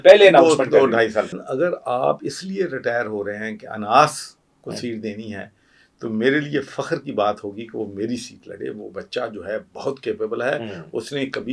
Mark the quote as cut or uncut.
cut